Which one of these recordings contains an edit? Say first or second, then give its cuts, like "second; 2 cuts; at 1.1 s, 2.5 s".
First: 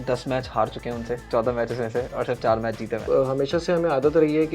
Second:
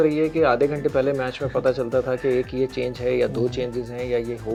first; 2 cuts; at 1.2 s, 3.0 s